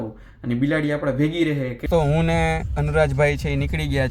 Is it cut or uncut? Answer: cut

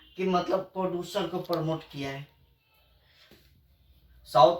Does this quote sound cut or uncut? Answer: cut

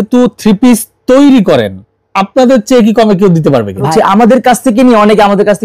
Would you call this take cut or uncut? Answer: cut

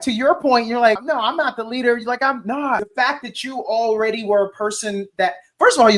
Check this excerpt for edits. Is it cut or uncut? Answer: cut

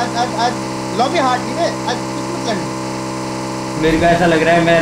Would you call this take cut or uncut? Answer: uncut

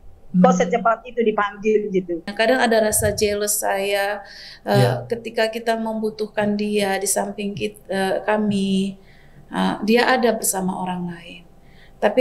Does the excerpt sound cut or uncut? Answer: cut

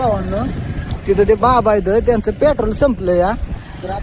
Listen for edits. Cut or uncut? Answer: uncut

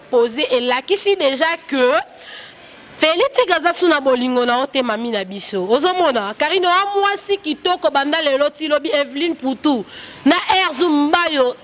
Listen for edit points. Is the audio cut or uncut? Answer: uncut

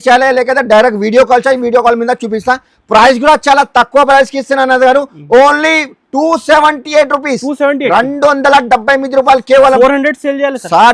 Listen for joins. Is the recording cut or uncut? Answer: uncut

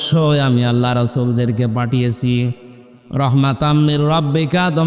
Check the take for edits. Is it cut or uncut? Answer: uncut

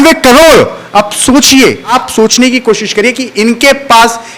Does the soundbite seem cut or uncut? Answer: cut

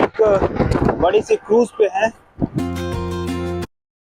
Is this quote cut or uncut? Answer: cut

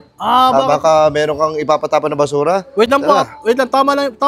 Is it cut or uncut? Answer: uncut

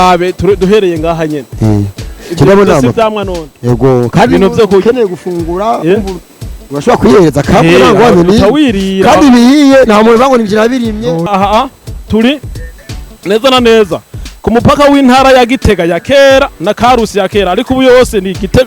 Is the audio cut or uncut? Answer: cut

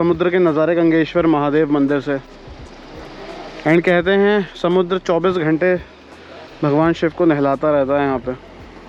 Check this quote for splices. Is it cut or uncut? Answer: uncut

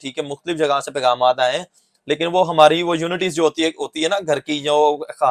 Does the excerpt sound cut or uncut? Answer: uncut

